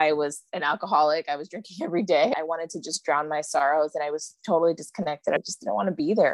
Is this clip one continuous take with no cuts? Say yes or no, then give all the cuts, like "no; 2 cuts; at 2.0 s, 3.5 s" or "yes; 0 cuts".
no; 2 cuts; at 2.3 s, 5.5 s